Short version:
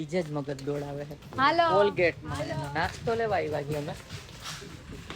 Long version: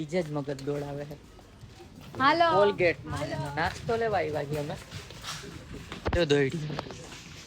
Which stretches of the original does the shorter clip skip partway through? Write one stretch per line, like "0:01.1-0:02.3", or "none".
0:01.2-0:02.0

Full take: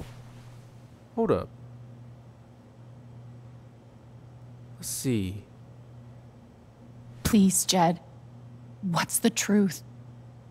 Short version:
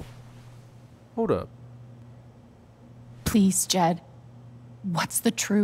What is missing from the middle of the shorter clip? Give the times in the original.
0:02.0-0:06.0

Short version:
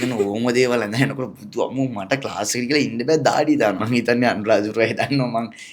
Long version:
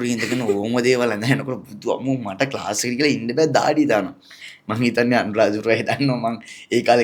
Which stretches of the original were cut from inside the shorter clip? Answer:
0:04.1-0:04.7

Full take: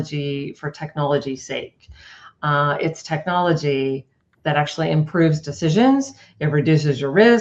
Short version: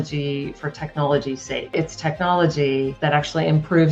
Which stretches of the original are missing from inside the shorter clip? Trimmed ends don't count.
0:01.7-0:02.8
0:04.0-0:04.4

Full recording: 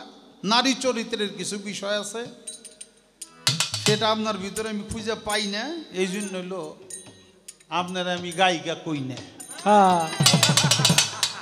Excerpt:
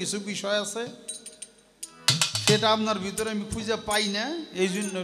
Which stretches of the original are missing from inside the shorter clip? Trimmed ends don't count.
none

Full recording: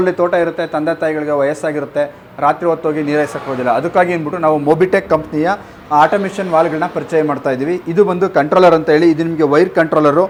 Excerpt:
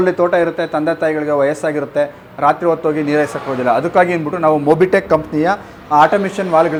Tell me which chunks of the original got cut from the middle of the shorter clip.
none

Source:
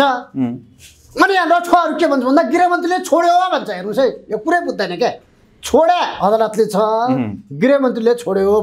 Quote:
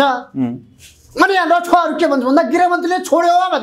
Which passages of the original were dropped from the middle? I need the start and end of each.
none

